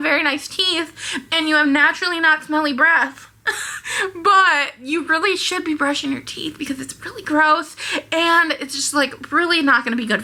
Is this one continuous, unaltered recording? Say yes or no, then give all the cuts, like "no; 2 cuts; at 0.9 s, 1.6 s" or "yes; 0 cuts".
yes; 0 cuts